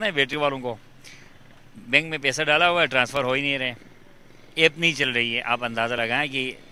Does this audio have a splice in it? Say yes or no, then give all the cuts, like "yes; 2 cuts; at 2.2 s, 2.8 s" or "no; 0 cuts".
no; 0 cuts